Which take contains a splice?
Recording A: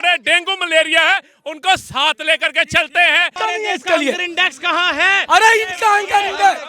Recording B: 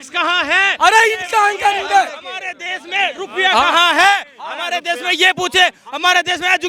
A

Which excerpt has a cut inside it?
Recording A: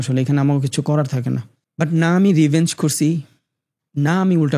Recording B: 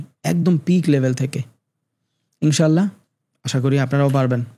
A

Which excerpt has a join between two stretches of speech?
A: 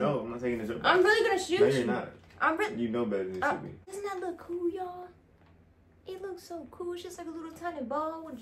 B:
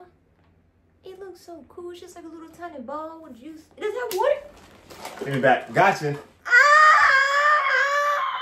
A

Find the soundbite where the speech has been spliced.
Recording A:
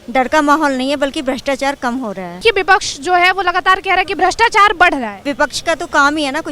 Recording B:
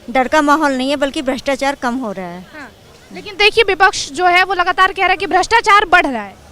A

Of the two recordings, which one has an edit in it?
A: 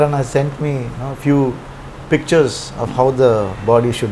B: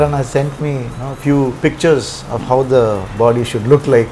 B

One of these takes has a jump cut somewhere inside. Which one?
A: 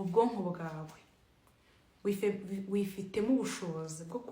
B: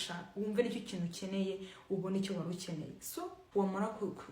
B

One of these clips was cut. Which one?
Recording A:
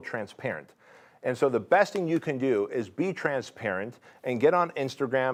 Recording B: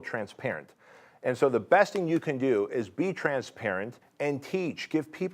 B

